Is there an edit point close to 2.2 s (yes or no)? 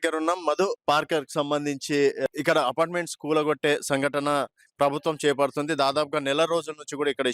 yes